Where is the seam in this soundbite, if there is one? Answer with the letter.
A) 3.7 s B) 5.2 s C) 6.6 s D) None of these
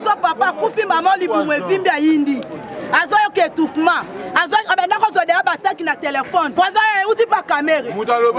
C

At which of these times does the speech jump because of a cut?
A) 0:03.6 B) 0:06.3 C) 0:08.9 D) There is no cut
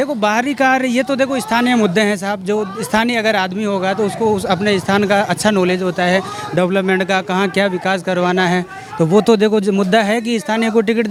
D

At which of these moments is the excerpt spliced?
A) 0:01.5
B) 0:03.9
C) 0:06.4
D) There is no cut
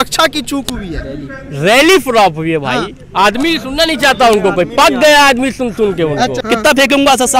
C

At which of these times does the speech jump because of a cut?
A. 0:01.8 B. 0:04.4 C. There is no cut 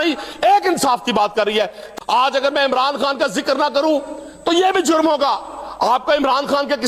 A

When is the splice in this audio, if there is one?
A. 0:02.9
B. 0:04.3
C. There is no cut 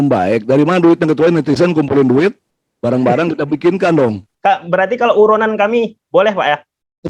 B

